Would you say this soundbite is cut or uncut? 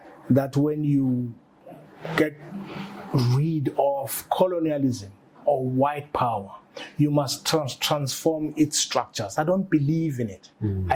uncut